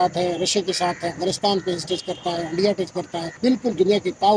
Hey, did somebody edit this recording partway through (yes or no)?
yes